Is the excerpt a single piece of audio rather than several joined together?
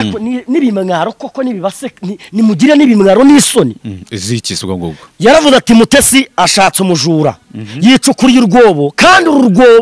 yes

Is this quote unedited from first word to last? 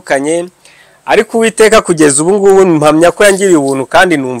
yes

